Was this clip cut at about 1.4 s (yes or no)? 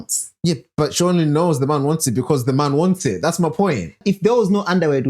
no